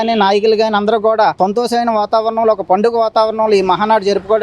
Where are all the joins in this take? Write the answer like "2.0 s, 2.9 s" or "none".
1.3 s